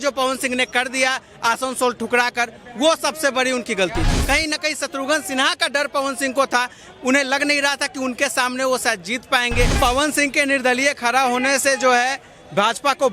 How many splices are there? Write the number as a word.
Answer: two